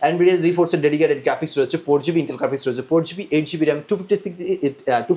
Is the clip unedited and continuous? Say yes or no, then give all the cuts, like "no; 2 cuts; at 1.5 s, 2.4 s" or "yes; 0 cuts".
yes; 0 cuts